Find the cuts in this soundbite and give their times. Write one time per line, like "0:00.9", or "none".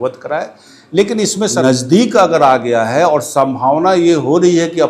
0:01.6

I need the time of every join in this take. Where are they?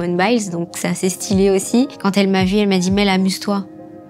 0:01.9

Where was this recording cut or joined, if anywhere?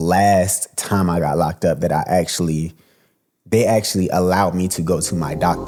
none

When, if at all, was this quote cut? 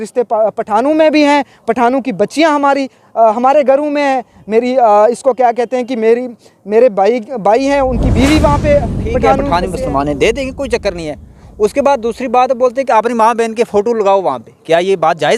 0:09.4

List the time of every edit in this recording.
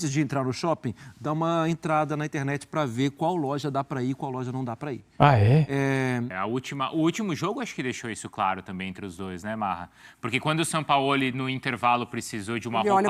0:06.3

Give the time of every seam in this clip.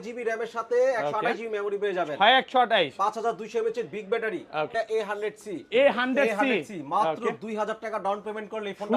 0:04.7

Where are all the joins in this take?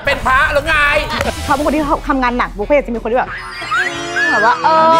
0:01.3

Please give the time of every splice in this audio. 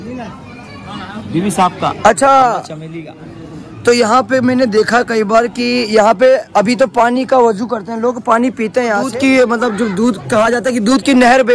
0:09.0

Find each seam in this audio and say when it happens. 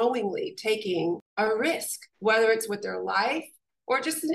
0:01.3

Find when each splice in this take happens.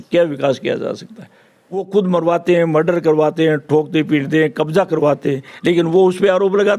0:01.3

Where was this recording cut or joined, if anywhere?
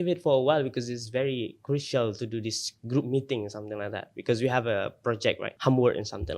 0:05.5

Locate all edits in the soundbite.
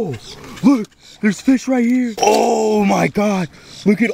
0:02.1

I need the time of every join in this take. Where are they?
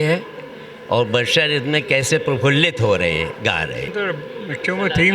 0:03.9

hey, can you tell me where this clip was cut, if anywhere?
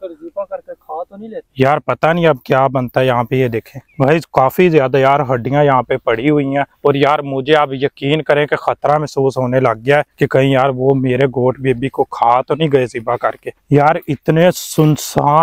0:13.6

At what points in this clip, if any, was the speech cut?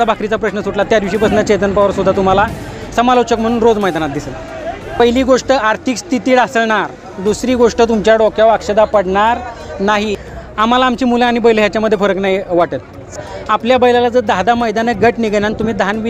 0:04.8
0:10.2
0:13.1

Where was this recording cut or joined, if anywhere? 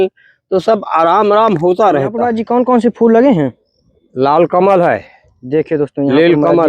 0:02.3

